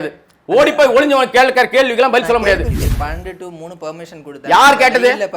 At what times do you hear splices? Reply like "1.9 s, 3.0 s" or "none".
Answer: 2.7 s